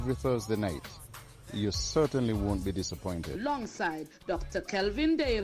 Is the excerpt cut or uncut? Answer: uncut